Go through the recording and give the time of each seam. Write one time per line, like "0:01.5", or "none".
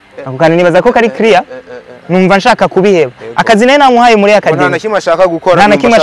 none

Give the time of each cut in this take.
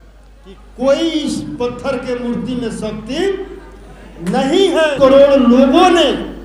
0:04.9

